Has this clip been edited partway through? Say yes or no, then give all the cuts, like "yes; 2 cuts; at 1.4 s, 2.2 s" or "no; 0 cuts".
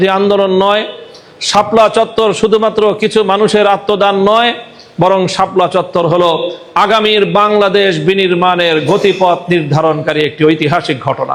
no; 0 cuts